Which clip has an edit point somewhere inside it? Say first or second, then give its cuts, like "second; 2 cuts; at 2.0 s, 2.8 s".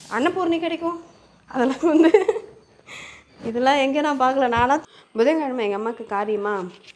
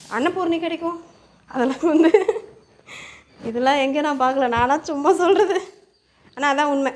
first; 1 cut; at 4.9 s